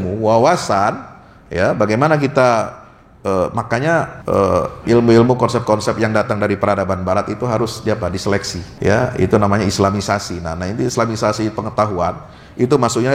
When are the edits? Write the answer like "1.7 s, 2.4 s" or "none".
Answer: 4.2 s, 8.6 s

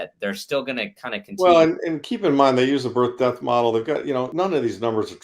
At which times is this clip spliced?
4.3 s

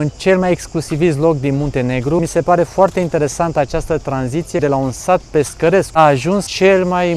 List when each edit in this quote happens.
2.2 s, 4.6 s, 6.3 s

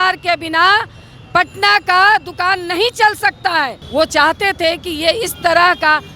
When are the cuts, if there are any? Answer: 3.8 s

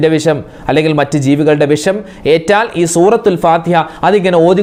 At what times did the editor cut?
none

